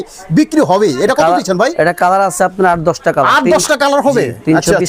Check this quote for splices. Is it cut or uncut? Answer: uncut